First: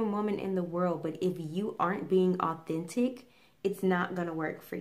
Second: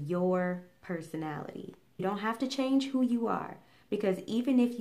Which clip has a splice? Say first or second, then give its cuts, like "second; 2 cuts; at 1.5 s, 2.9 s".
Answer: second; 1 cut; at 2.0 s